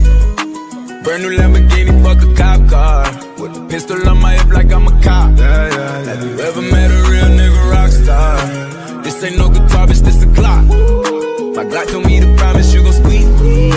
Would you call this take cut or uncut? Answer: uncut